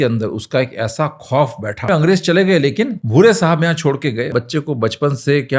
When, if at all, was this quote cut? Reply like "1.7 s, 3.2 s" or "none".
1.9 s, 3.0 s, 4.3 s